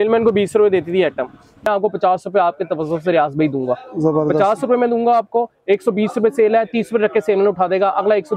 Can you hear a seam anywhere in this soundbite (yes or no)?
yes